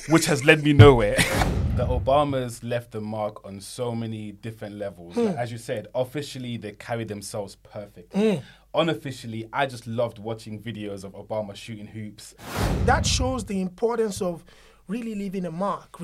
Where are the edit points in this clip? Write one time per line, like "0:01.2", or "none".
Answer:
0:01.3
0:12.7